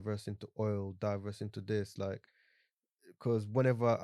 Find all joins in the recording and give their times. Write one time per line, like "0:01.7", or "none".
none